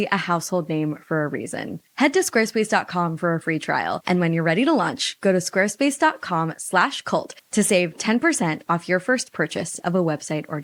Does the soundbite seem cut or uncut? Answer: uncut